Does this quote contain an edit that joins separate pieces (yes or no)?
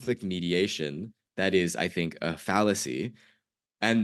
no